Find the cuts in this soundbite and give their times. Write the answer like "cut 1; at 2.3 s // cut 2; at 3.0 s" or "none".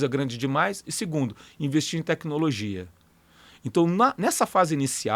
none